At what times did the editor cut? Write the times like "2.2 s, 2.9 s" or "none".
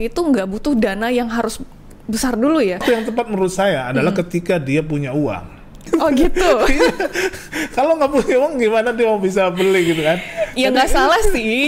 2.8 s